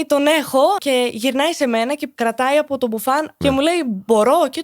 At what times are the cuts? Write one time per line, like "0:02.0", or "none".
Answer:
0:00.8
0:02.1
0:03.3